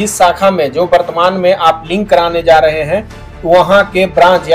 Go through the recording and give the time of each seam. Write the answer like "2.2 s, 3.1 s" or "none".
none